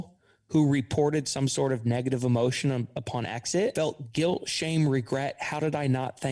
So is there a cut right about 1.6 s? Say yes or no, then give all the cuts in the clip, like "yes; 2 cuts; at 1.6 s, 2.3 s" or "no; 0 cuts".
no; 1 cut; at 3.7 s